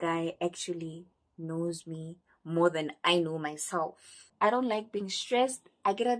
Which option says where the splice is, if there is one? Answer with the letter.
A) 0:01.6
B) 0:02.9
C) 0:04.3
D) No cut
C